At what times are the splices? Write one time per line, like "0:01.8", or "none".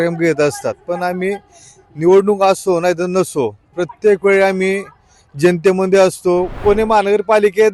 0:06.6